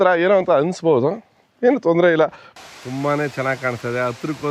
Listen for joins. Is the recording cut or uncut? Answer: cut